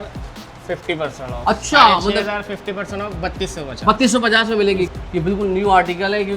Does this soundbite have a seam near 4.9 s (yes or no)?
yes